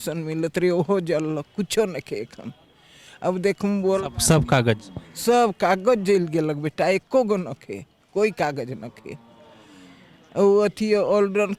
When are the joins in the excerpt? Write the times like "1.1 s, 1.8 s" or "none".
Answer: none